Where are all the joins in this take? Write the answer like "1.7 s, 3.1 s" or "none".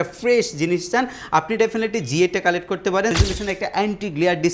3.1 s